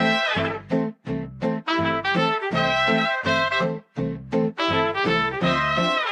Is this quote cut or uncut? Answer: uncut